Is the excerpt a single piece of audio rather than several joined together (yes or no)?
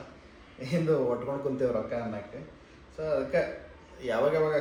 yes